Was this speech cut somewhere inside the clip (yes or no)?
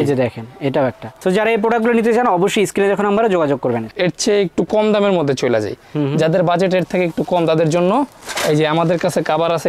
no